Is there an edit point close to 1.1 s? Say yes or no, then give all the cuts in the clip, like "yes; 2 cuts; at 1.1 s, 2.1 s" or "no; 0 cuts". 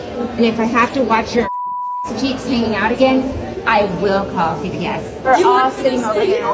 no; 1 cut; at 5.3 s